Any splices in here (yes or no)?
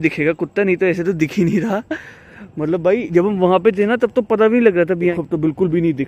yes